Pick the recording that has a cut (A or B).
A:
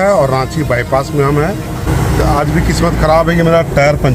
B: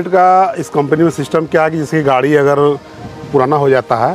A